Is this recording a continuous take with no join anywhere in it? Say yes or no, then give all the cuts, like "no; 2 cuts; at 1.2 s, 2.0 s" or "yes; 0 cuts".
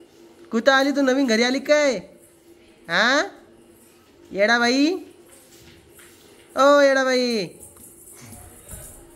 yes; 0 cuts